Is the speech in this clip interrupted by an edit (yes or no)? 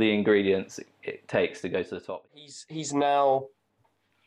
yes